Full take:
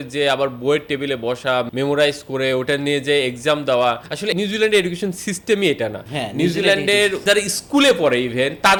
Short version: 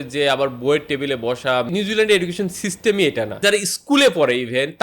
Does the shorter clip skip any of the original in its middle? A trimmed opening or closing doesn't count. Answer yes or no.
yes